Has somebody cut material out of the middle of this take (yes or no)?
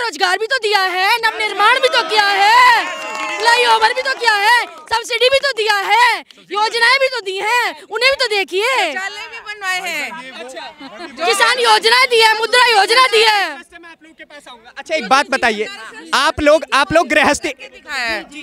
no